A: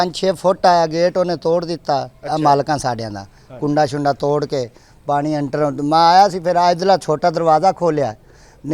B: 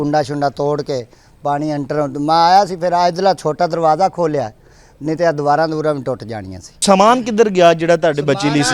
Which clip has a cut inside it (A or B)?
B